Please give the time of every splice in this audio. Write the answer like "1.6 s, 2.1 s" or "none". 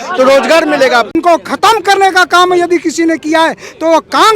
1.1 s

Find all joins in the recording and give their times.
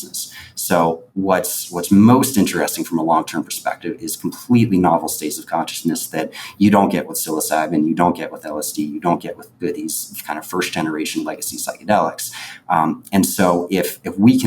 none

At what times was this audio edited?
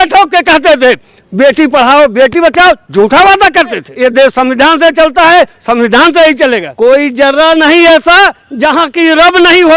3.9 s, 6.7 s

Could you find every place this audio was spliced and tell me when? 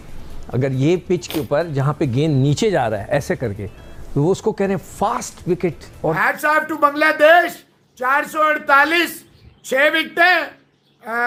none

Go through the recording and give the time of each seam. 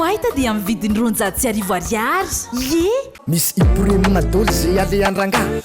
3.2 s

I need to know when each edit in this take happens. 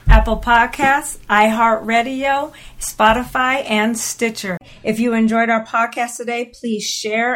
4.6 s

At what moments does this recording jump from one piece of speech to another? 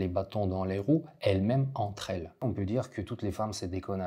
2.4 s

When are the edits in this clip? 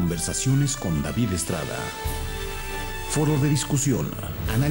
1.9 s

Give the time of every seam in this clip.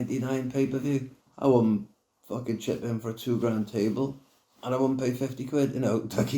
1.2 s

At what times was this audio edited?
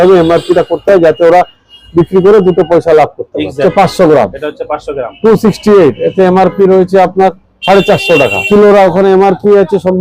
3.6 s, 8.4 s

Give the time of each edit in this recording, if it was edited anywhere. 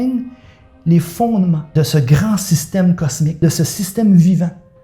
1.6 s, 3.3 s

